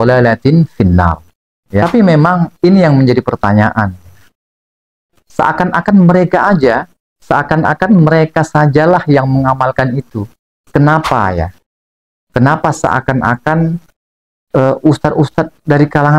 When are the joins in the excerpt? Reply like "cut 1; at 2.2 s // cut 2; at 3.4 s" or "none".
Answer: cut 1; at 1.8 s // cut 2; at 10.6 s